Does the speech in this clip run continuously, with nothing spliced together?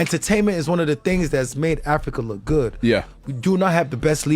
no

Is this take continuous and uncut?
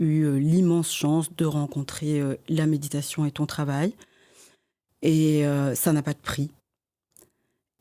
yes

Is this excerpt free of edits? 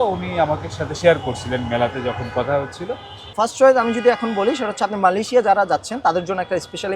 no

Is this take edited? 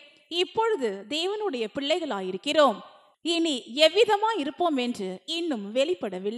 no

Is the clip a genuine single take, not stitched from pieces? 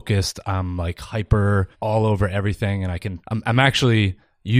no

